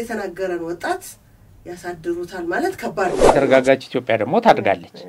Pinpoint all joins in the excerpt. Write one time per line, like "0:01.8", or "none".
0:03.3